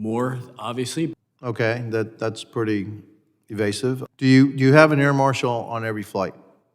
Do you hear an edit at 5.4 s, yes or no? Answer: no